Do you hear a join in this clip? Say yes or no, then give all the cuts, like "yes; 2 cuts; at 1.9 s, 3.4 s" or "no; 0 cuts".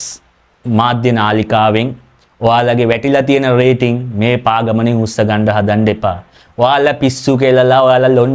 no; 0 cuts